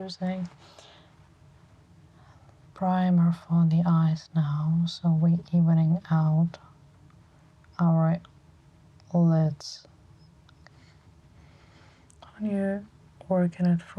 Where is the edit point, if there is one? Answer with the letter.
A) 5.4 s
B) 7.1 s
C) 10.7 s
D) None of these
C